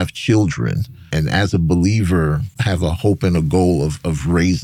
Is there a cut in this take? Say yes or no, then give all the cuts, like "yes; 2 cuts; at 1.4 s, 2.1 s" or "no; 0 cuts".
yes; 2 cuts; at 1.1 s, 2.6 s